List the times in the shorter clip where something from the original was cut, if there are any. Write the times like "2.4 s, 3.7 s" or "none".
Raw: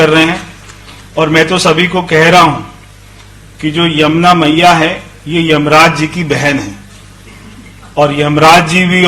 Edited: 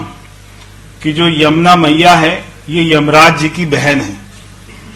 none

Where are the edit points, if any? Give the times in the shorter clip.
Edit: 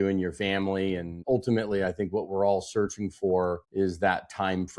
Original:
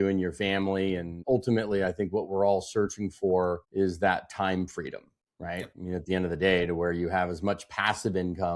none

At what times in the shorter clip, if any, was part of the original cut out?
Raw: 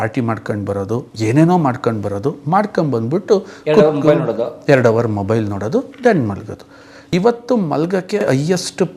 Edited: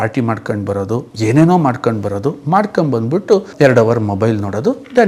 3.5 s

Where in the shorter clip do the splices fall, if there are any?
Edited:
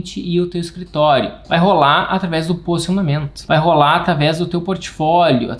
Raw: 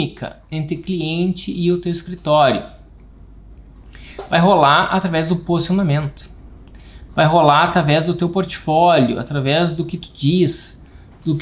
1.4 s, 3.3 s

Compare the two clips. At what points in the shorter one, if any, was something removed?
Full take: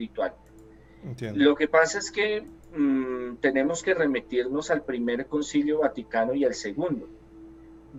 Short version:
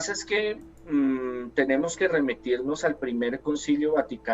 none

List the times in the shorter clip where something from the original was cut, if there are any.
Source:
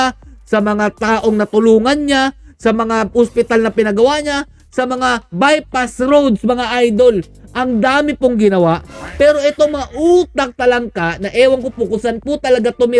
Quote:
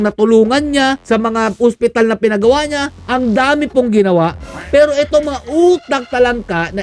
1.0 s, 3.0 s

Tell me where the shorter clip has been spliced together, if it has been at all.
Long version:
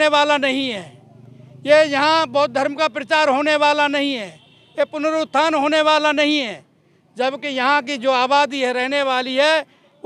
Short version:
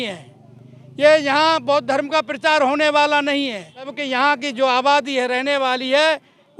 3.9 s

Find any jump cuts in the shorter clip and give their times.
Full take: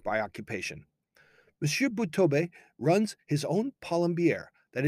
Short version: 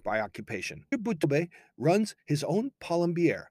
1.2 s

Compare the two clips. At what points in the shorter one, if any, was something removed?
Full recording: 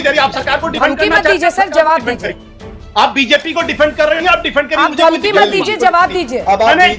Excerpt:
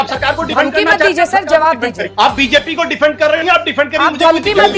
2.0 s

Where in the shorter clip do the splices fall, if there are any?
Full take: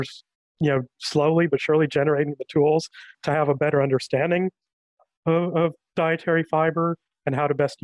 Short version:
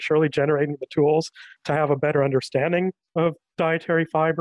3.1 s

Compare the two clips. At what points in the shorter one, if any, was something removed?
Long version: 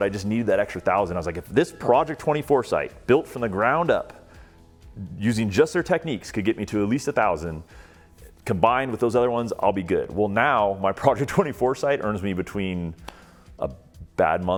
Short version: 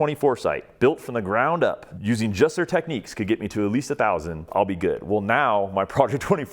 1.9 s, 4.5 s

